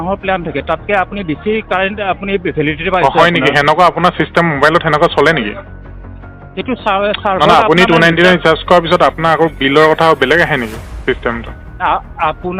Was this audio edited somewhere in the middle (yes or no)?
no